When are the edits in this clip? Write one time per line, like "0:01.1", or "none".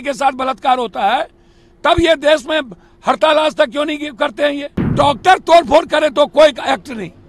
0:04.9